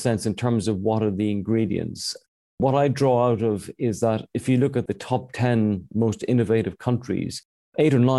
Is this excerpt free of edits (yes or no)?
no